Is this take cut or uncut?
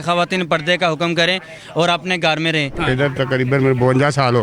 cut